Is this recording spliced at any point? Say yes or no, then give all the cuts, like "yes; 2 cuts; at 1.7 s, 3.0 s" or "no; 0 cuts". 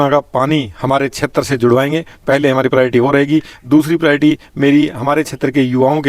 no; 0 cuts